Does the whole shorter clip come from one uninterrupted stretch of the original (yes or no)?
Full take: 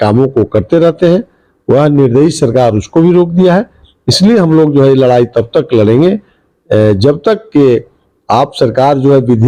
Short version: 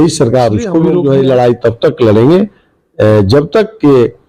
no